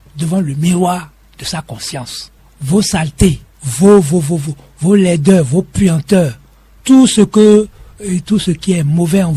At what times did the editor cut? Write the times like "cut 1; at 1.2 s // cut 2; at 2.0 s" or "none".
none